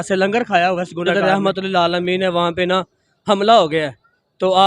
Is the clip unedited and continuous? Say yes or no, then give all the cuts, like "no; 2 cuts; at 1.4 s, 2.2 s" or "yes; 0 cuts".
no; 1 cut; at 1.1 s